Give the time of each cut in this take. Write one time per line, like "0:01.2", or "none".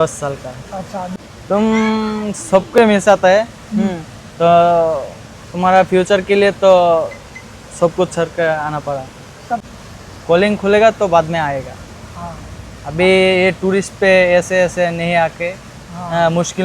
0:01.1
0:09.7

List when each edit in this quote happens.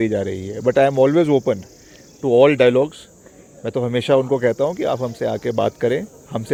none

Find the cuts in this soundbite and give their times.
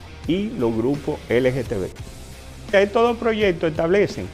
none

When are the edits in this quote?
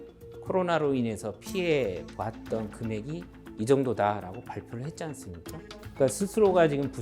0:05.8

